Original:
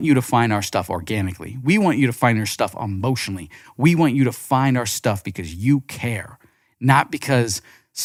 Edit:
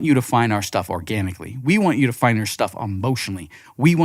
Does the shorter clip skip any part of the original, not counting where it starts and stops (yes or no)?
no